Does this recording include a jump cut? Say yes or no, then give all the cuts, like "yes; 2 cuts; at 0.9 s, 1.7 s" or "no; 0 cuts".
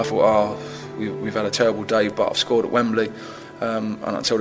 no; 0 cuts